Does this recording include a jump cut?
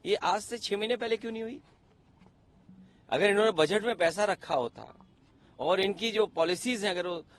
no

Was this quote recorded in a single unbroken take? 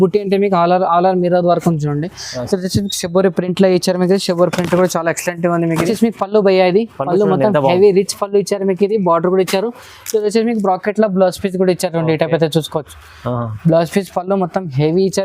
no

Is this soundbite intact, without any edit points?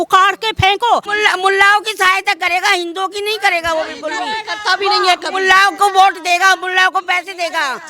no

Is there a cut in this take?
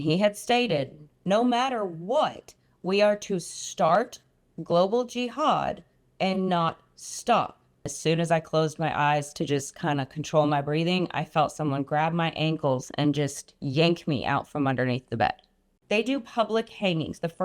yes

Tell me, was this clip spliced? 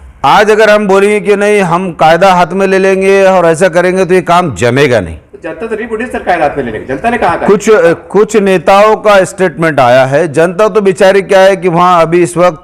no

